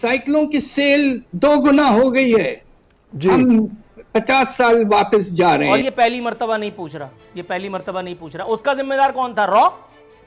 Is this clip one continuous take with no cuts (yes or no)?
no